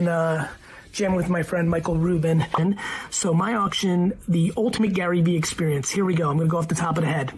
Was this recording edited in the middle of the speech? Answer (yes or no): yes